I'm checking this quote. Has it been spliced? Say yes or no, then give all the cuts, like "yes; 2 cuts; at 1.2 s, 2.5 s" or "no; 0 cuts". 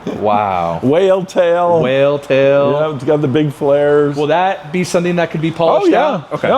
yes; 1 cut; at 4.2 s